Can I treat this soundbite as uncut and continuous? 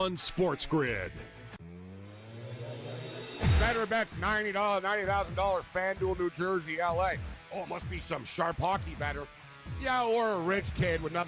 no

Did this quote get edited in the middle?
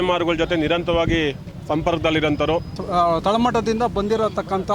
yes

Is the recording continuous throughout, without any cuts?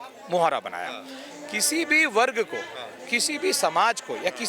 yes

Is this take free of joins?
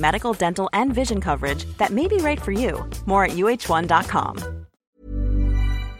no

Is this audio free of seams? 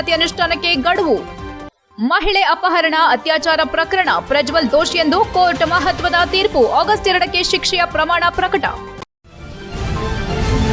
no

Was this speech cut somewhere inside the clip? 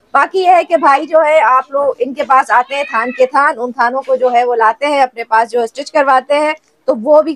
no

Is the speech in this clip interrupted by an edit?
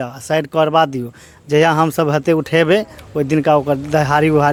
no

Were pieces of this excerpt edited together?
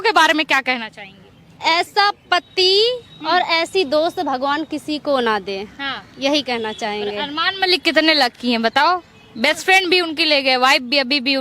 no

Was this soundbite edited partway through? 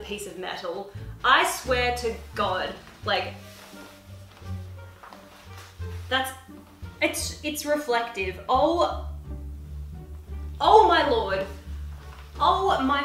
no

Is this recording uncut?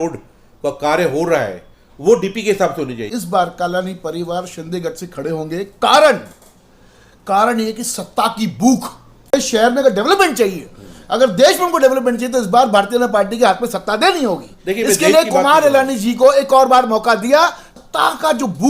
no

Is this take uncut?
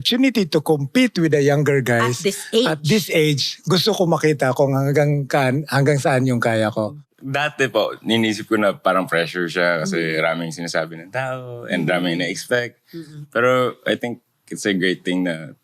no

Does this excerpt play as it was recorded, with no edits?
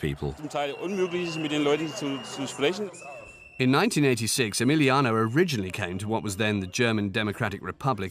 no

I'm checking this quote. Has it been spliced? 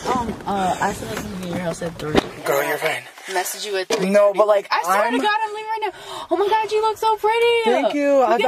no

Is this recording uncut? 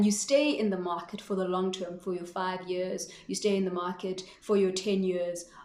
yes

